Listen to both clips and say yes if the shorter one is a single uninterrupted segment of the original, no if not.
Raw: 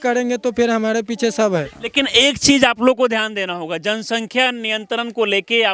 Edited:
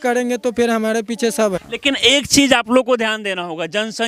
no